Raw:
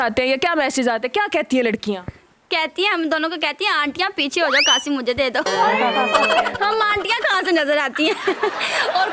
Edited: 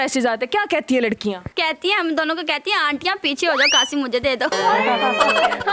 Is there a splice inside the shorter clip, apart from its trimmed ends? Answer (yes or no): yes